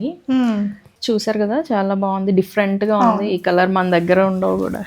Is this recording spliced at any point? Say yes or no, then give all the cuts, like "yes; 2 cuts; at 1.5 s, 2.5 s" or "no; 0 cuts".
yes; 1 cut; at 1.0 s